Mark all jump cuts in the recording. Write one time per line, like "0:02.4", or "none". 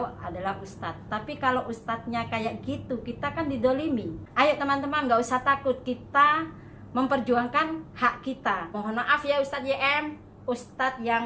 0:04.2
0:08.7